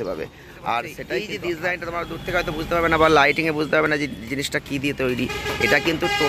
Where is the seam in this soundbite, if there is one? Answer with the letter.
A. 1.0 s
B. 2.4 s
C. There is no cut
A